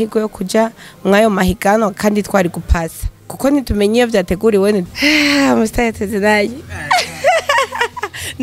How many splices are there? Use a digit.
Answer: 1